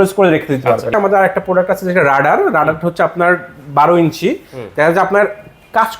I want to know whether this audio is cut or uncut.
cut